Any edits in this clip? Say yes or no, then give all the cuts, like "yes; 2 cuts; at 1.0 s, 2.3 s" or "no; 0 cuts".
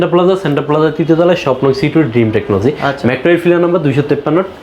no; 0 cuts